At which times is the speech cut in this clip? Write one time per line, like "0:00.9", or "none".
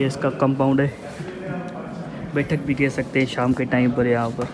none